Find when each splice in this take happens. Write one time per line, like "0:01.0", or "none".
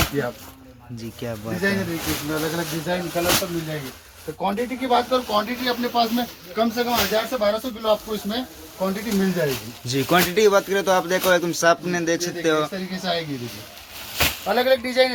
none